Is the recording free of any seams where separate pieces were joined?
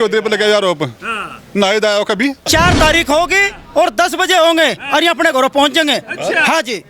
no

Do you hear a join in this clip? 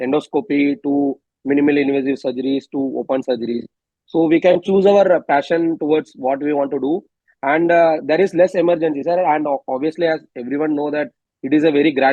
no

